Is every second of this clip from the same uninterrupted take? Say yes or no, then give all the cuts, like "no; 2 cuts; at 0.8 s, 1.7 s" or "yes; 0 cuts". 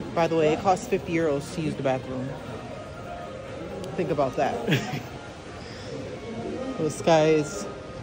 yes; 0 cuts